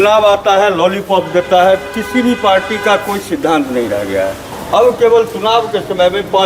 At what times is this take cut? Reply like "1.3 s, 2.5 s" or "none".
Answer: 4.5 s

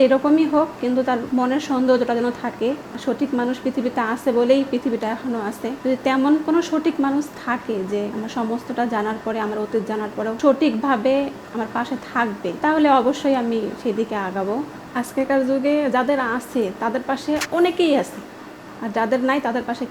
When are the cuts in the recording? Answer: 1.3 s, 2.9 s, 5.7 s, 8.1 s, 10.4 s, 12.6 s, 14.8 s

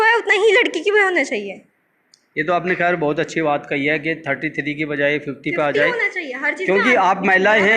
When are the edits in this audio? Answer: none

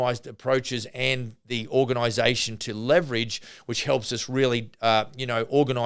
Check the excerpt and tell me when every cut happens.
none

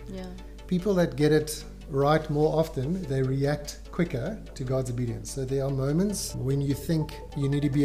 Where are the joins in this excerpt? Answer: 4.5 s

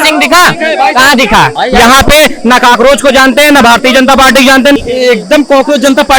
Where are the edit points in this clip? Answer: 1.5 s, 4.8 s

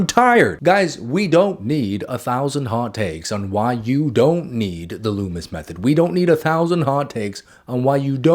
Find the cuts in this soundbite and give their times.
none

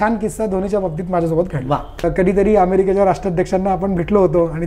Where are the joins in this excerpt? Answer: 2.0 s

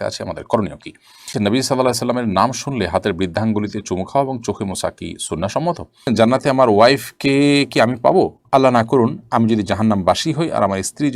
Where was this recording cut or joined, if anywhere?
1.3 s, 6.1 s

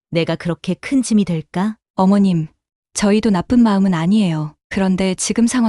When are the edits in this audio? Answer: 1.8 s

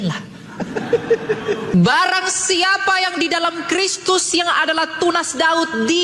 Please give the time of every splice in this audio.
1.8 s

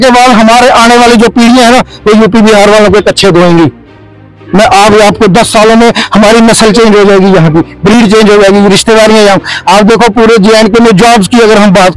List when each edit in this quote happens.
none

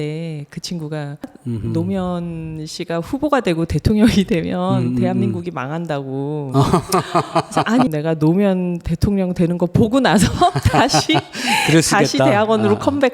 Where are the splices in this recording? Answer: 1.3 s, 7.9 s

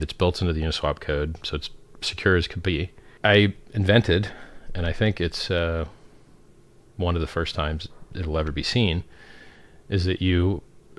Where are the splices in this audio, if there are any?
3.0 s

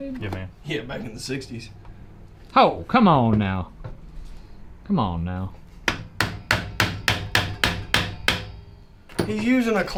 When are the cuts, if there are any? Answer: none

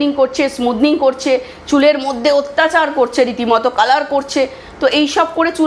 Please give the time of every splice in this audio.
none

